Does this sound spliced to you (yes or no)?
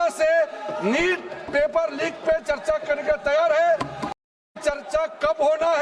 yes